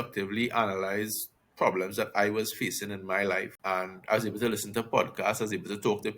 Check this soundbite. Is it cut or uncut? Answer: cut